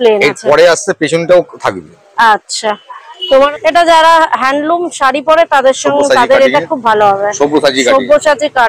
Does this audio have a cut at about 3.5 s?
yes; 1 cut; at 3.5 s

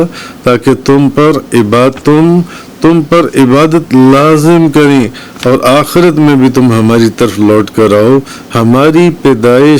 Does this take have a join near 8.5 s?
yes; 1 cut; at 8.5 s

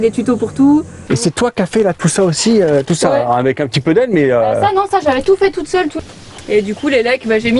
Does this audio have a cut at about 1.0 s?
yes; 2 cuts; at 1.0 s, 5.9 s

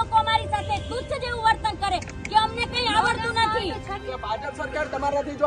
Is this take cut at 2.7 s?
no; 1 cut; at 4.0 s

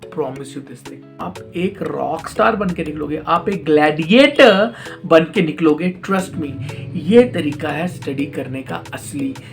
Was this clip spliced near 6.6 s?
no; 1 cut; at 1.1 s

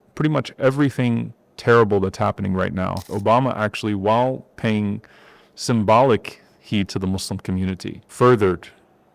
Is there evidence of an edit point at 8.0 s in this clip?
yes; 2 cuts; at 3.1 s, 8.0 s

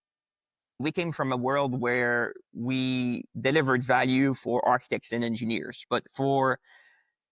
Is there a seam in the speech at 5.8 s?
yes; 2 cuts; at 0.8 s, 5.8 s

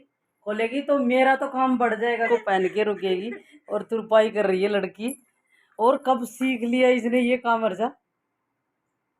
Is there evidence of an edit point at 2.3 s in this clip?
yes; 1 cut; at 2.3 s

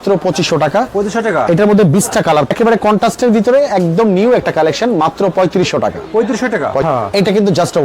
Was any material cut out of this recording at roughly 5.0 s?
no; 2 cuts; at 2.5 s, 6.8 s

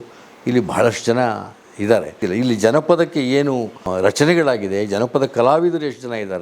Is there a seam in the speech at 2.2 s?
yes; 1 cut; at 2.2 s

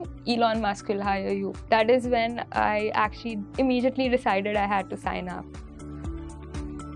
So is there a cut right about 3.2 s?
no; 2 cuts; at 1.6 s, 5.6 s

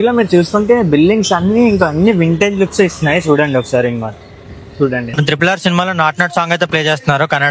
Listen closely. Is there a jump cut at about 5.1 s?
yes; 1 cut; at 5.1 s

